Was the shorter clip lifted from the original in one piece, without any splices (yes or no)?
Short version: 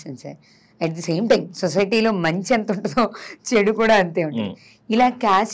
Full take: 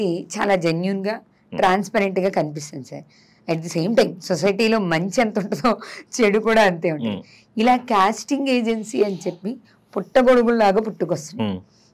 yes